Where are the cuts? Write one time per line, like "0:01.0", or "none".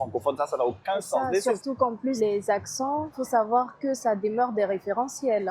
0:02.2
0:03.1